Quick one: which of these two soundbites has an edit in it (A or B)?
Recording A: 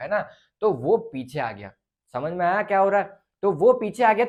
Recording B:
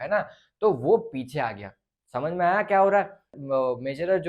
B